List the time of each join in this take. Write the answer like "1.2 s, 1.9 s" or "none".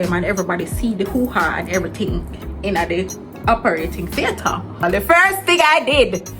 4.8 s